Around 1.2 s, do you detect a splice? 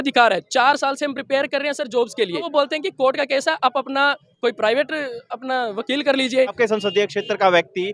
no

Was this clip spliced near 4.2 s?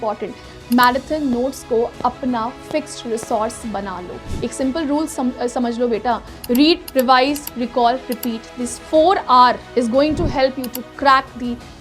yes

